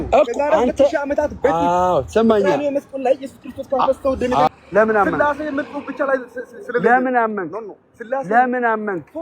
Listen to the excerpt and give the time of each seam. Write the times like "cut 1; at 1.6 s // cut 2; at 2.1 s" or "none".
cut 1; at 4.5 s